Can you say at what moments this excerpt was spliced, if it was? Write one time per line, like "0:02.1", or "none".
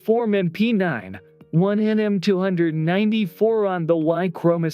0:01.8